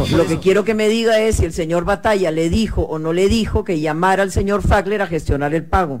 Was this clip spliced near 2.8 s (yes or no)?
no